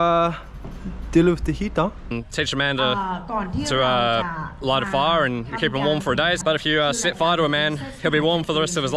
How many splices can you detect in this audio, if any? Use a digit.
2